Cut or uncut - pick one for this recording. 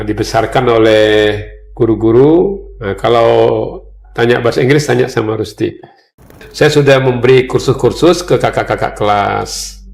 cut